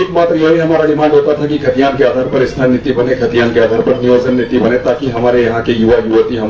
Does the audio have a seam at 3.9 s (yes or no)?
no